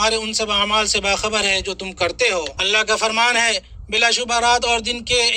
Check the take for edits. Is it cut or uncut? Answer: cut